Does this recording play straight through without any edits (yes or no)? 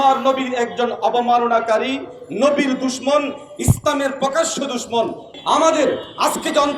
no